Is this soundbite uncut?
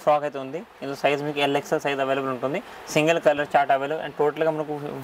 yes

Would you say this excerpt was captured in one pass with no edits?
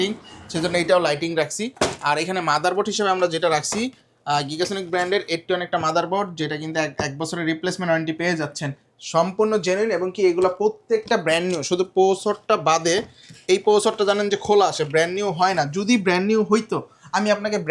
yes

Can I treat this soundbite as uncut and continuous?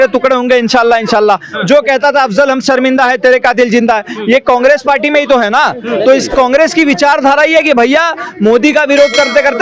yes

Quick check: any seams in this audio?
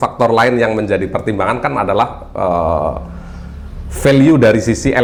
no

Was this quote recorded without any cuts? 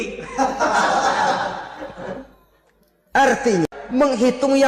no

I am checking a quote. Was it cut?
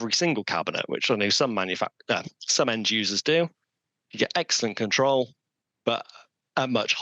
no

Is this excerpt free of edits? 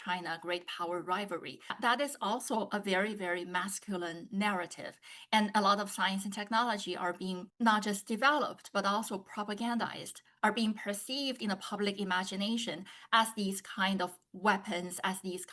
no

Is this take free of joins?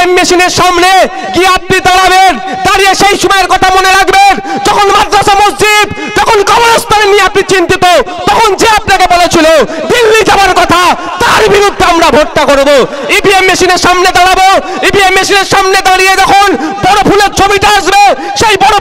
yes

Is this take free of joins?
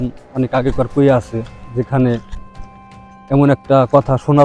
yes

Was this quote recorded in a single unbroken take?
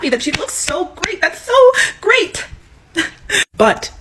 yes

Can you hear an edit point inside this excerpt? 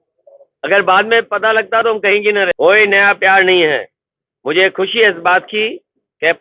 yes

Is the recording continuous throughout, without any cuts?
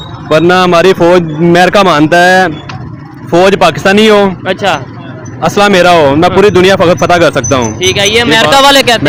yes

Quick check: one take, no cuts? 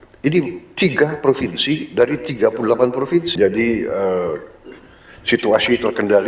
no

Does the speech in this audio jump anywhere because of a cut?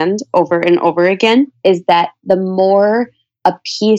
yes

